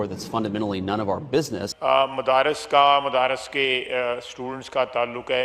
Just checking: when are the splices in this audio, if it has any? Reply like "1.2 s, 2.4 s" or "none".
1.6 s